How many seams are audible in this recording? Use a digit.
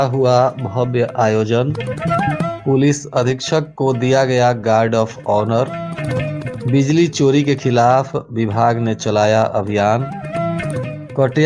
0